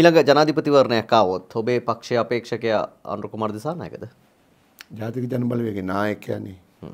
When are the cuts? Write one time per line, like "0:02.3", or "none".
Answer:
none